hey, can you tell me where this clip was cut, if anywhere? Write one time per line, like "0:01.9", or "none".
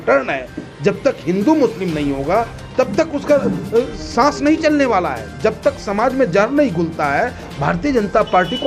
none

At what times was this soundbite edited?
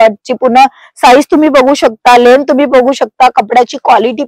none

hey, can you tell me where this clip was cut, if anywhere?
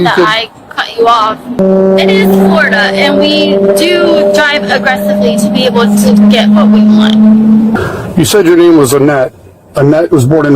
0:01.6
0:07.7

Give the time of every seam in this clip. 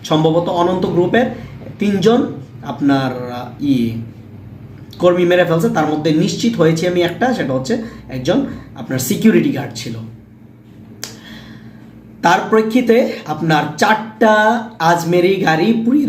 none

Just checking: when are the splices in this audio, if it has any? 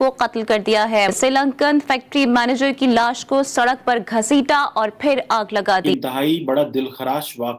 0:01.1
0:05.9

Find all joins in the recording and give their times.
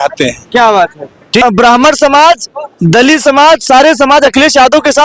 none

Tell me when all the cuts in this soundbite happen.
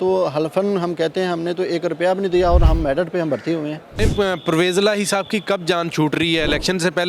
0:04.0

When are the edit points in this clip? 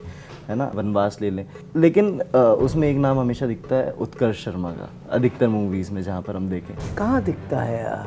0:00.8
0:01.6
0:06.8

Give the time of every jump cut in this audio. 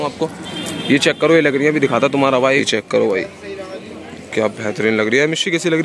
0:02.6

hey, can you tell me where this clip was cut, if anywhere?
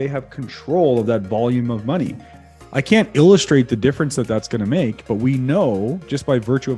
none

